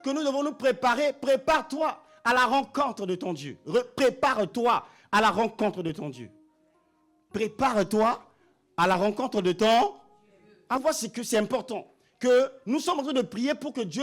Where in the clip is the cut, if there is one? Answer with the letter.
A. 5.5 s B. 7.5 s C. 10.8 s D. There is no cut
C